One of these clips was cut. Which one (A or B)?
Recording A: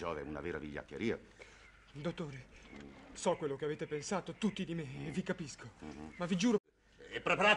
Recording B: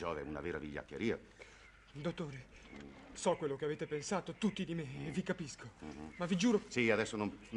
B